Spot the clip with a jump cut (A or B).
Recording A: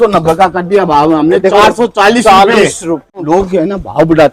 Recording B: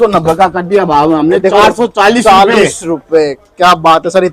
A